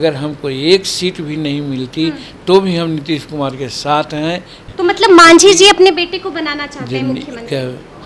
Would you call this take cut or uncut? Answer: cut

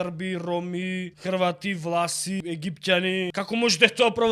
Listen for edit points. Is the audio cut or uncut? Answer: cut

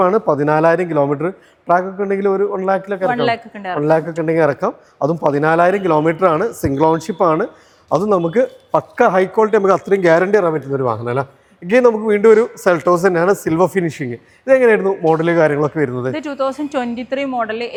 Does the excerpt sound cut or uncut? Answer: uncut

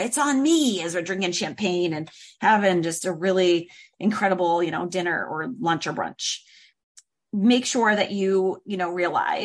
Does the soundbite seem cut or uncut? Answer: cut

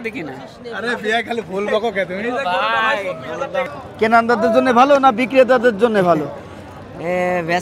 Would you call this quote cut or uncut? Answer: cut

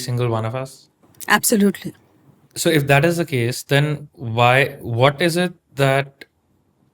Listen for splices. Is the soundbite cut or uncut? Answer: uncut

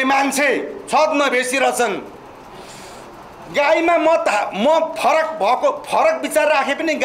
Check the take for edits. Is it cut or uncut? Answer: uncut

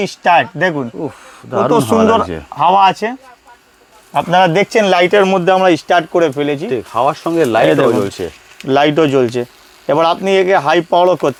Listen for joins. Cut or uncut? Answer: uncut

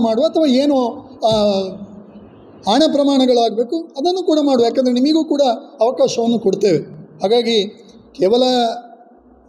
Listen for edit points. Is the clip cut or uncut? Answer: uncut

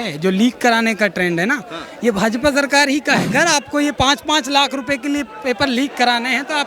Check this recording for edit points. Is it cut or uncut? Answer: cut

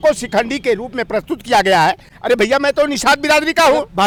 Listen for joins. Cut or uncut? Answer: uncut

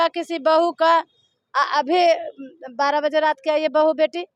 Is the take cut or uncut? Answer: uncut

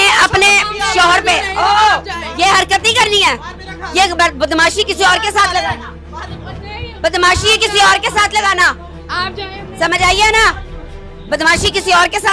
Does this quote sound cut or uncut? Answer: uncut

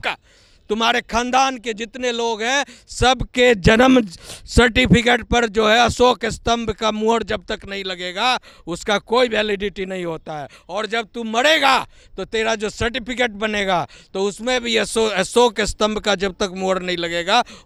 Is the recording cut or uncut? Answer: uncut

